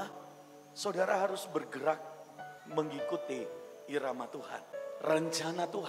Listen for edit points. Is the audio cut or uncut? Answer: cut